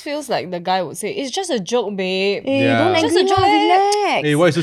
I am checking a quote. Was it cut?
no; 0 cuts

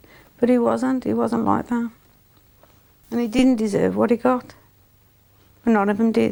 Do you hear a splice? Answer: no; 0 cuts

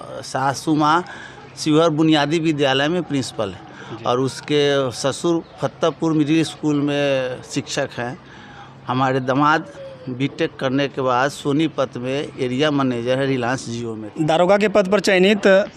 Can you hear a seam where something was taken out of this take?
yes; 1 cut; at 14.0 s

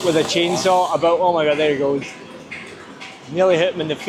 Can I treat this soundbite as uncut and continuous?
yes; 0 cuts

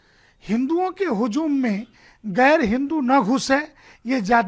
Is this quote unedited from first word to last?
yes; 0 cuts

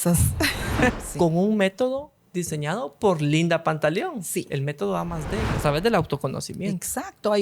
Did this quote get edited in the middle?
yes; 2 cuts; at 1.0 s, 5.6 s

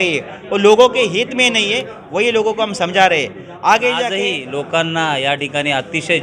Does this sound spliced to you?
yes; 1 cut; at 4.3 s

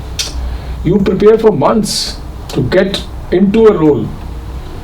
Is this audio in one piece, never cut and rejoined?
yes; 0 cuts

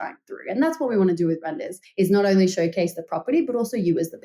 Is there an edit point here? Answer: no; 0 cuts

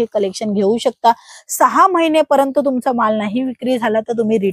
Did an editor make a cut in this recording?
no; 0 cuts

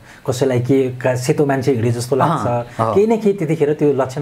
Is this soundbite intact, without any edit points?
yes; 0 cuts

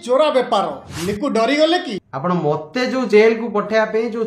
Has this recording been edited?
yes; 1 cut; at 2.0 s

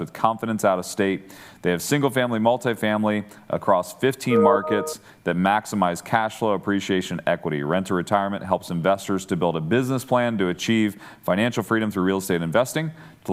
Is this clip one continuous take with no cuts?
yes; 0 cuts

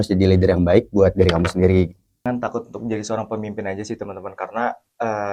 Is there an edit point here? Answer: yes; 1 cut; at 2.2 s

